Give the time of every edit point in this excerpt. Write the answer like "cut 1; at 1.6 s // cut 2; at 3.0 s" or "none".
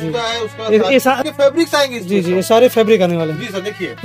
cut 1; at 1.2 s